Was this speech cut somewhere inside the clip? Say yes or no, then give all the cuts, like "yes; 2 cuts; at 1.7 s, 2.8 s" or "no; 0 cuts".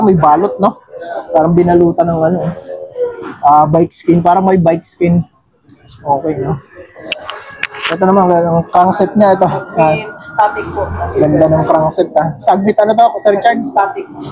no; 0 cuts